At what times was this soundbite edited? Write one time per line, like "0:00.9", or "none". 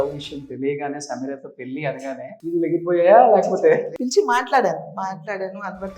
0:02.3
0:03.9